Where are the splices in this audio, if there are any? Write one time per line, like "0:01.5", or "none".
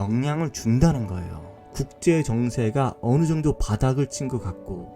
0:01.6